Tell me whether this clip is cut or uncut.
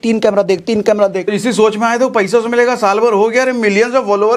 cut